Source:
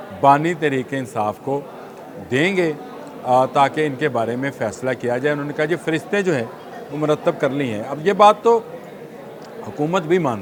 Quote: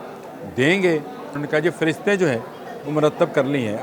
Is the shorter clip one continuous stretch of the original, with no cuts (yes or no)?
no